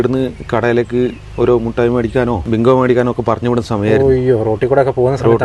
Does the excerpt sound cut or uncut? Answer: cut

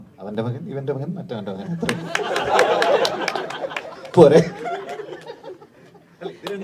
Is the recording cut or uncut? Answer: uncut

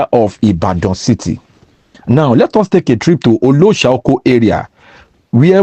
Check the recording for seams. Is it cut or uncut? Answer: uncut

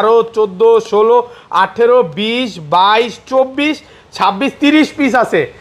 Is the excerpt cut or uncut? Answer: uncut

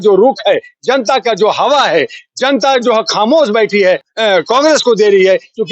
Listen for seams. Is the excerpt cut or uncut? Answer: cut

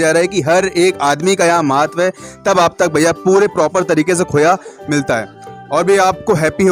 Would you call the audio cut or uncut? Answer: uncut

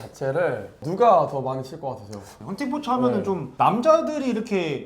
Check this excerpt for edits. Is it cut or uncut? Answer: cut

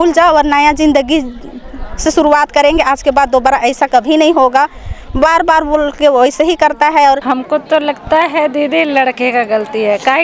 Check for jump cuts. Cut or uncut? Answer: cut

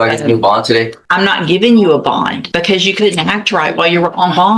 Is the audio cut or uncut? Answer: cut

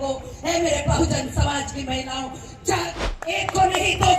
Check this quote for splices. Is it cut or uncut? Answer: cut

